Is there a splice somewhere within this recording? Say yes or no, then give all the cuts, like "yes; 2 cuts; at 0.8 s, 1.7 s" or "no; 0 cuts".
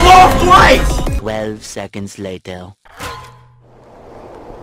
yes; 1 cut; at 2.8 s